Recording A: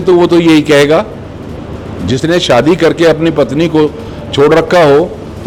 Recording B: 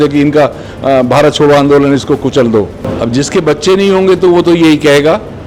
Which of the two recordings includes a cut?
B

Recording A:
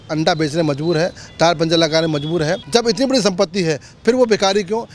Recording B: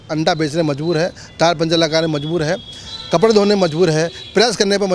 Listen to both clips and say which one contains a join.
A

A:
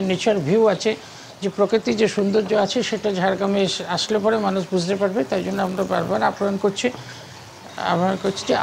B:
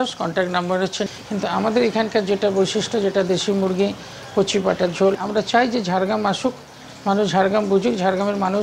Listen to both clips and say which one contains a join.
B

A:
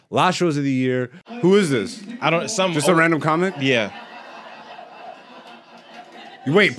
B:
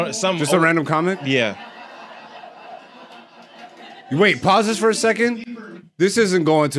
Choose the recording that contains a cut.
A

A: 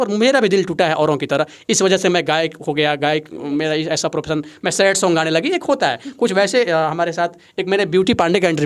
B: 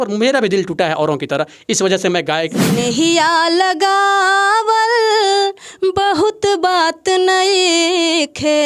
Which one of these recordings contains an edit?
B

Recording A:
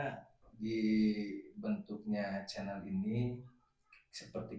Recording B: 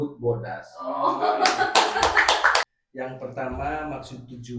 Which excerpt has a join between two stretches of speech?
B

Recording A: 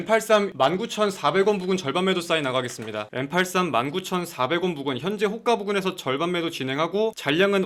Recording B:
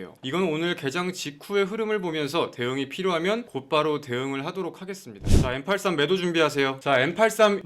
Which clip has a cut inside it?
B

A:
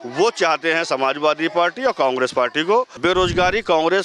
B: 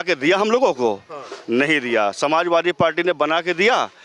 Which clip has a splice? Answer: A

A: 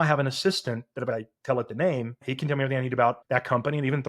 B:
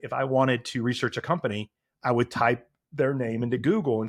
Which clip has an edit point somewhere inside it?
A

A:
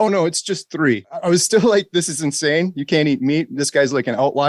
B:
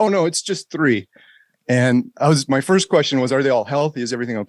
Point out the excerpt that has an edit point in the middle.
A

